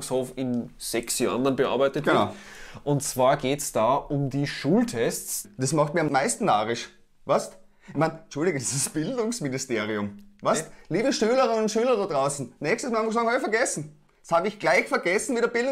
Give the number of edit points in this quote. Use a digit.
1